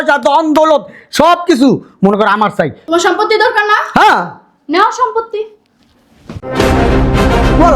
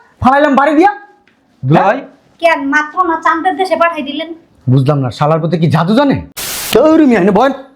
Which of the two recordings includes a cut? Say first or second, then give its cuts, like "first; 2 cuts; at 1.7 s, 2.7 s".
second; 1 cut; at 6.5 s